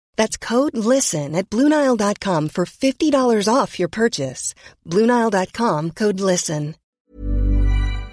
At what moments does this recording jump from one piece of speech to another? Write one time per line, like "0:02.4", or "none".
0:06.8